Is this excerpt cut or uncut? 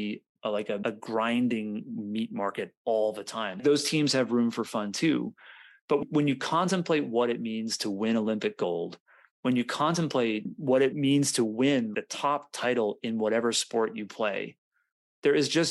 uncut